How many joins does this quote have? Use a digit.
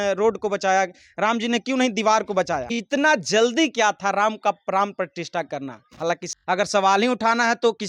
2